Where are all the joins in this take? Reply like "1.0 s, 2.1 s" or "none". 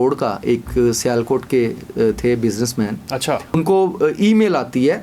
3.6 s